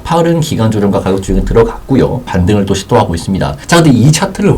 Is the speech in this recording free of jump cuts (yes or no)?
no